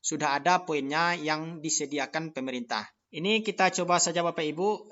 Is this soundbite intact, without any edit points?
no; 1 cut; at 3.0 s

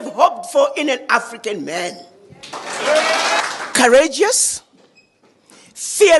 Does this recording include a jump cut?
yes; 1 cut; at 3.4 s

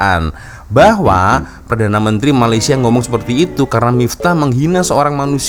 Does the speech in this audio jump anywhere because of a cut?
no; 0 cuts

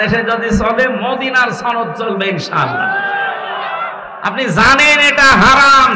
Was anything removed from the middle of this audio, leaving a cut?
yes; 1 cut; at 4.0 s

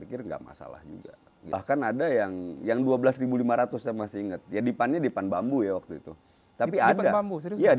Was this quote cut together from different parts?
yes; 1 cut; at 1.6 s

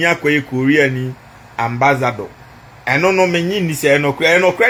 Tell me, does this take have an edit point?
no; 0 cuts

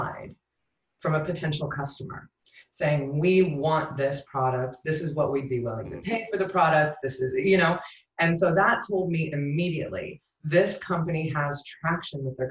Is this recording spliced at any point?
no; 0 cuts

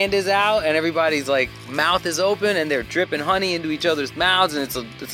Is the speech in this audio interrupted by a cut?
no; 0 cuts

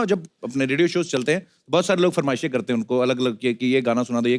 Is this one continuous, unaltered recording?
yes; 0 cuts

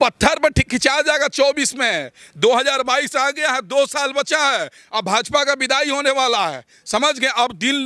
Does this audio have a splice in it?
no; 0 cuts

